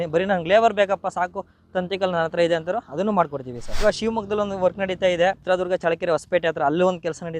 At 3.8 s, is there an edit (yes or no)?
yes